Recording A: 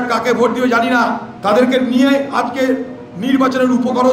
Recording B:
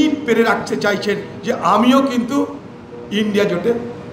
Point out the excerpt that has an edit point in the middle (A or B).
A